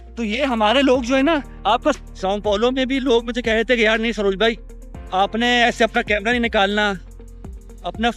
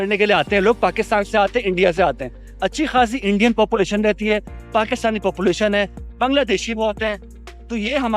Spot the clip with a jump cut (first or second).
first